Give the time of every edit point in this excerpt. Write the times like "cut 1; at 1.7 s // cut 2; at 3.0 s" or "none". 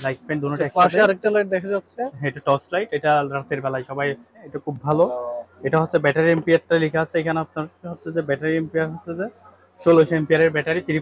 none